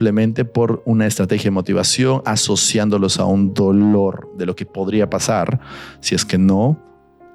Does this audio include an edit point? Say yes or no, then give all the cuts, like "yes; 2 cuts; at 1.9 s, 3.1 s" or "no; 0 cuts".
no; 0 cuts